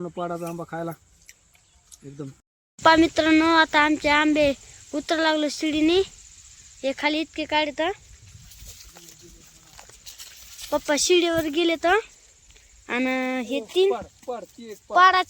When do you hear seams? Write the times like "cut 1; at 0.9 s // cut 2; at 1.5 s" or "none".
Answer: cut 1; at 2.4 s